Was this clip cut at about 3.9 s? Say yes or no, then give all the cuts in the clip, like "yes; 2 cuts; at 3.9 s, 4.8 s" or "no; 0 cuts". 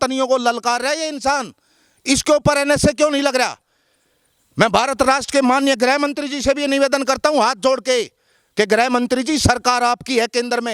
no; 0 cuts